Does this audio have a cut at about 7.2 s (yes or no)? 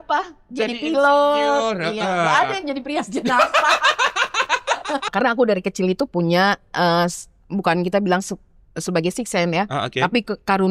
no